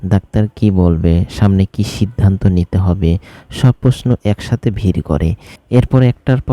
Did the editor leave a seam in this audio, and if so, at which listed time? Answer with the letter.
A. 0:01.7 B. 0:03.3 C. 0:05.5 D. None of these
C